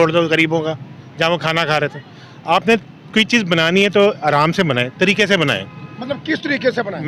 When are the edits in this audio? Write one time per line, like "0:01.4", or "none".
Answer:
none